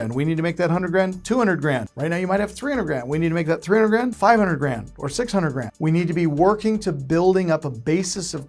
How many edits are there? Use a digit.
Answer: 3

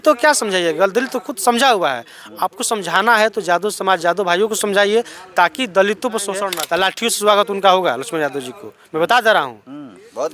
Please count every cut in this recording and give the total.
1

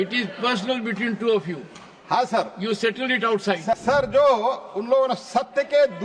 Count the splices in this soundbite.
1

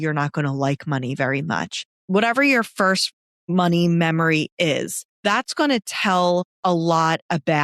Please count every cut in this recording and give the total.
2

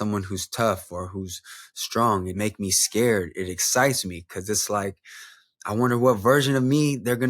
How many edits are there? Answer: 1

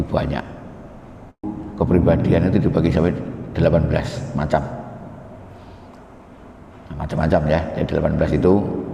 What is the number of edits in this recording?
1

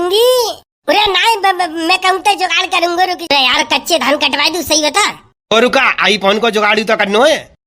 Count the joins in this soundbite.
1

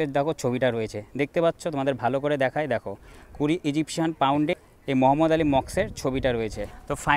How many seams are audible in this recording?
0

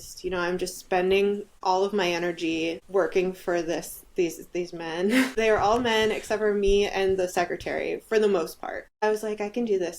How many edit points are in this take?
4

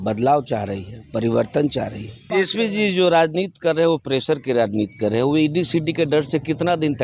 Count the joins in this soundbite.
1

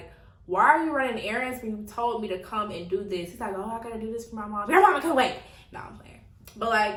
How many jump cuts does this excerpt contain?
0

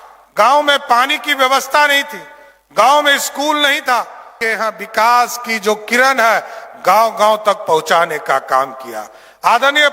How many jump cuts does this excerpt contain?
1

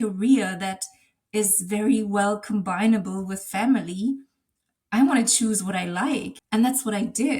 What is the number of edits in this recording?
1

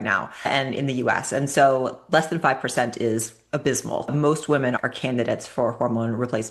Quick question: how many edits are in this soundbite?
1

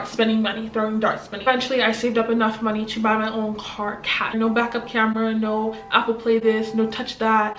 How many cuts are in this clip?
2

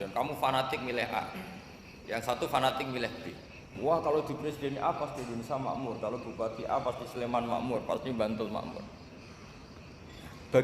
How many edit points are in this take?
1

